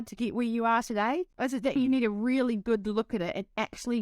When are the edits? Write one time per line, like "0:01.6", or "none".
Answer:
0:01.3